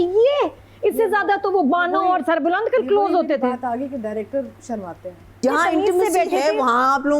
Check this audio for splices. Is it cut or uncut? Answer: cut